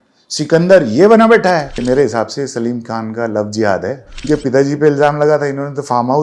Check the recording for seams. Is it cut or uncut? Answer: cut